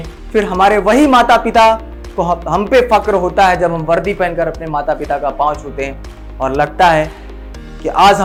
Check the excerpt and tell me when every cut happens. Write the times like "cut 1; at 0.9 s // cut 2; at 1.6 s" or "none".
none

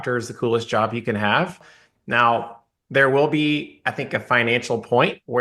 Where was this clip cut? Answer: cut 1; at 1.6 s

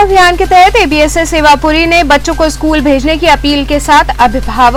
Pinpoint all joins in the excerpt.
none

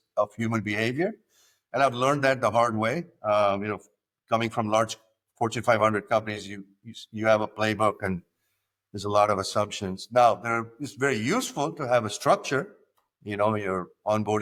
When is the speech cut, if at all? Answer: none

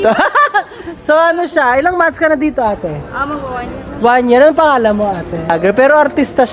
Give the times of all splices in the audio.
cut 1; at 5.5 s

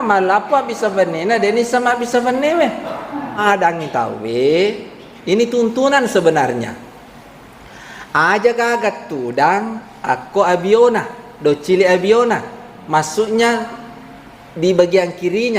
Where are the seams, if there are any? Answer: cut 1; at 3.4 s

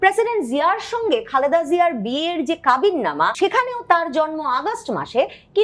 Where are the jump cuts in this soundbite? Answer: cut 1; at 3.3 s

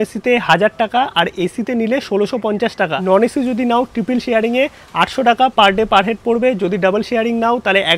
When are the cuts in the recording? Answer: cut 1; at 3.0 s

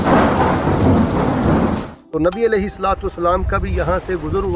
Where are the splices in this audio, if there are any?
cut 1; at 2.0 s

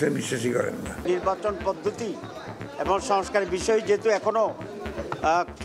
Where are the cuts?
cut 1; at 1.0 s

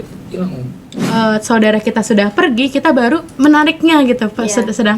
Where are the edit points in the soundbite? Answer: cut 1; at 0.9 s // cut 2; at 3.3 s

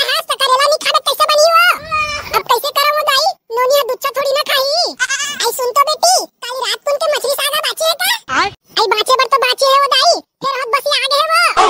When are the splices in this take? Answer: none

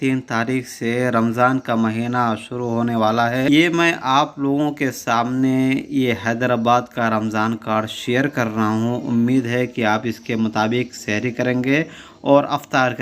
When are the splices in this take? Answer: cut 1; at 3.5 s

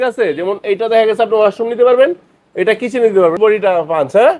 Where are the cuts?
cut 1; at 3.4 s

